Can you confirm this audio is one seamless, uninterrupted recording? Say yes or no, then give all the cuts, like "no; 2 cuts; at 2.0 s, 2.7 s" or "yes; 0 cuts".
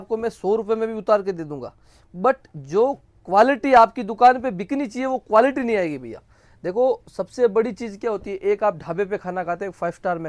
yes; 0 cuts